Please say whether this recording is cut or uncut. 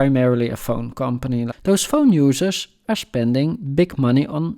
cut